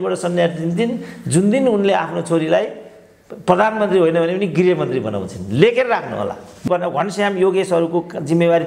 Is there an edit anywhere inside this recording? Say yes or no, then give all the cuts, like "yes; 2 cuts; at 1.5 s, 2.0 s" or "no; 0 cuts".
yes; 1 cut; at 6.6 s